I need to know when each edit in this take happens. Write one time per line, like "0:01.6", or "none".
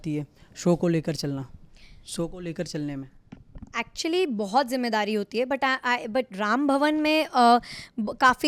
none

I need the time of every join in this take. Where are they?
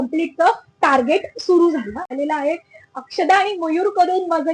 0:02.1

